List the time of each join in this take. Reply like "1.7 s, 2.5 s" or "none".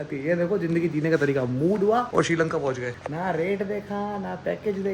none